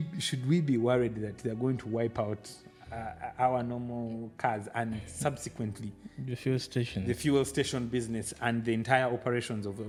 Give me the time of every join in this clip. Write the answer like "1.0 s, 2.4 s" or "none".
none